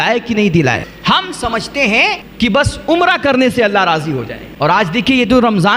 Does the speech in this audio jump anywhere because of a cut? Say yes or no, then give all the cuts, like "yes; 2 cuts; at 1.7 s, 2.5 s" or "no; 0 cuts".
yes; 3 cuts; at 0.9 s, 2.2 s, 4.4 s